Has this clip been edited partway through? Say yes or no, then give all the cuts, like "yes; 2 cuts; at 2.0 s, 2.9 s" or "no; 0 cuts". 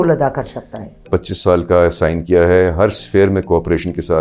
yes; 1 cut; at 1.0 s